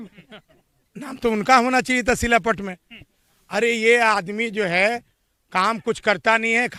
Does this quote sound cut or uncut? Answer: uncut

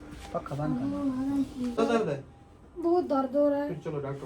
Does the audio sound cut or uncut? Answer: cut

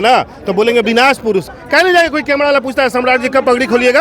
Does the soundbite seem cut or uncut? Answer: cut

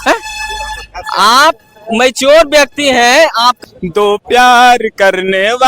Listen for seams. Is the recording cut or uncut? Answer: cut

